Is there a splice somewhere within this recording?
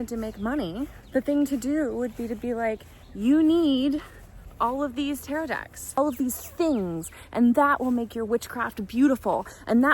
yes; 2 cuts; at 1.0 s, 6.0 s

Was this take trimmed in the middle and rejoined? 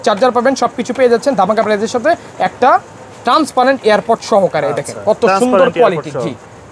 no; 0 cuts

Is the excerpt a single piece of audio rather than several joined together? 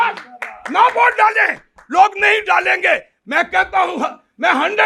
yes; 0 cuts

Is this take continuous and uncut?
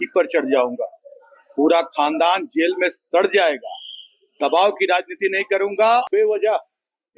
no; 1 cut; at 6.1 s

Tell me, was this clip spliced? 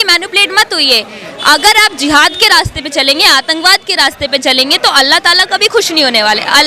no; 0 cuts

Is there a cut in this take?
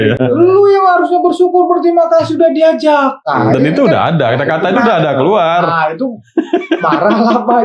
no; 0 cuts

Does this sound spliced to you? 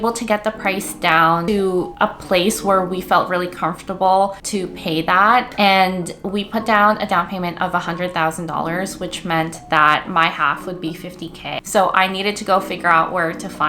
yes; 2 cuts; at 5.5 s, 11.6 s

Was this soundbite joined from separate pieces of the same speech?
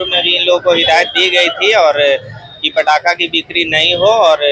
no; 0 cuts

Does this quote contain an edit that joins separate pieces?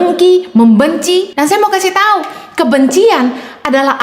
yes; 1 cut; at 1.3 s

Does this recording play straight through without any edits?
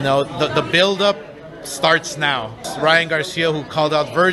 yes; 0 cuts

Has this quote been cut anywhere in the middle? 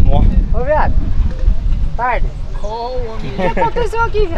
no; 0 cuts

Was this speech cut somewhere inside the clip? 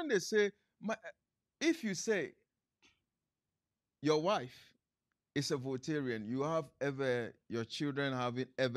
no; 0 cuts

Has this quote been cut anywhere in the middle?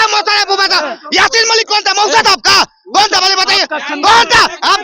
no; 0 cuts

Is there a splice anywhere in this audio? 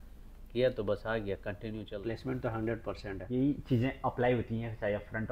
yes; 2 cuts; at 1.9 s, 3.2 s

